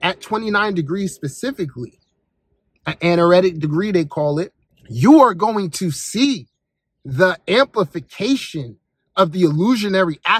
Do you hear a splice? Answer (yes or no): no